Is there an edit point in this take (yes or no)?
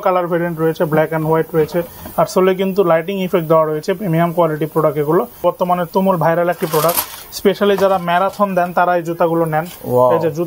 yes